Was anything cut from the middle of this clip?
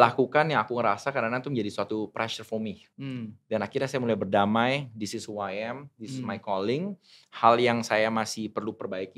yes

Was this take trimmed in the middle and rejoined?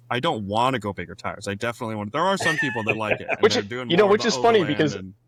no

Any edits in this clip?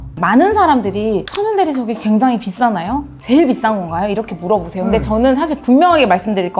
no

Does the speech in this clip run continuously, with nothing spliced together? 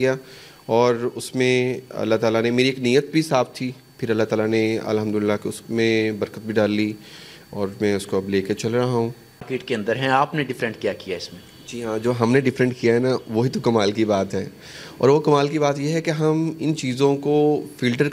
no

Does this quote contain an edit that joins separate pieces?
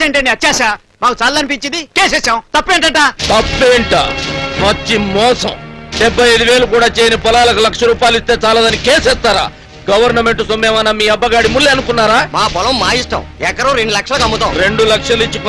no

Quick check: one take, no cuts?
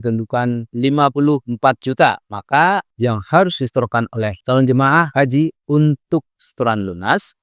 yes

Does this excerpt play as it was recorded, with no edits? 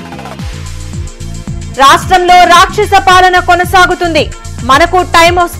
no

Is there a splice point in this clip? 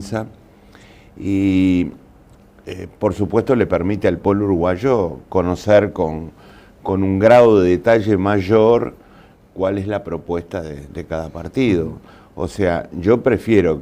no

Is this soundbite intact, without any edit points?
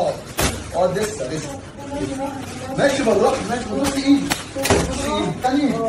yes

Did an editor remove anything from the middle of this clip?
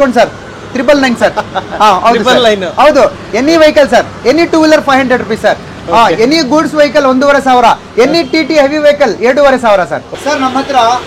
yes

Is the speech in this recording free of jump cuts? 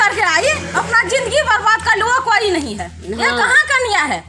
yes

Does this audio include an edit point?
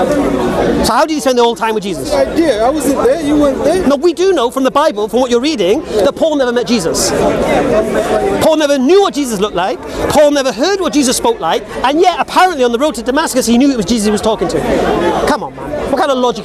no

